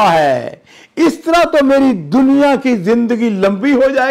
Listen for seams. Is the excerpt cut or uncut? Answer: uncut